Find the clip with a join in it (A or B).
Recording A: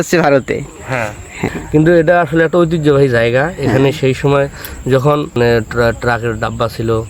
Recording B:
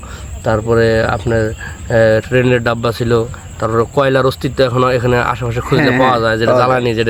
A